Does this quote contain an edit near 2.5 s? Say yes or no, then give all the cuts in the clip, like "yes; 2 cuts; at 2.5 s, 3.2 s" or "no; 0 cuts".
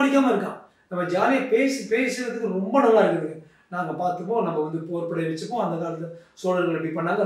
no; 0 cuts